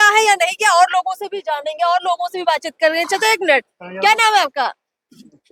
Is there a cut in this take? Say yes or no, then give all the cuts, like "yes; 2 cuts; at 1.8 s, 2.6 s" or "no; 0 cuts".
no; 0 cuts